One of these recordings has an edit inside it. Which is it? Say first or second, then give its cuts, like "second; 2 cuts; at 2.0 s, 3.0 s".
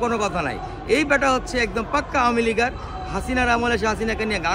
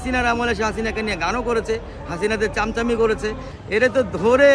second; 1 cut; at 3.5 s